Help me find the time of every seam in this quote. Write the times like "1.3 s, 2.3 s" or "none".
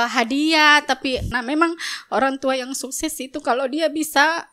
1.3 s